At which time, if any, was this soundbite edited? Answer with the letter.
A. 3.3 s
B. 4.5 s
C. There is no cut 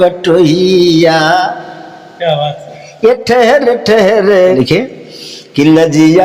B